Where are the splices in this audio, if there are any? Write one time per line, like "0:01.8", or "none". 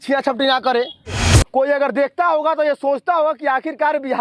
0:01.3

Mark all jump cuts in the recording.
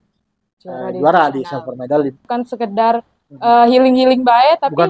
0:02.2

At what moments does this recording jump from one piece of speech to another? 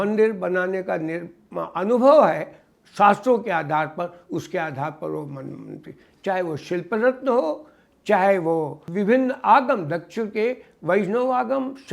0:08.8

